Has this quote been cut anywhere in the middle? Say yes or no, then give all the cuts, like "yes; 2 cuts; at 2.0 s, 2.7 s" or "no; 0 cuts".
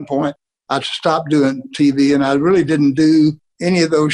no; 0 cuts